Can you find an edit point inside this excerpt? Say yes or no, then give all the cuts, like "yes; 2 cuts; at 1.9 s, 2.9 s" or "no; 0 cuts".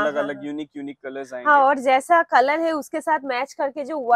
no; 0 cuts